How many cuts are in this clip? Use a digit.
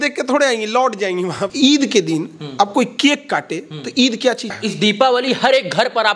2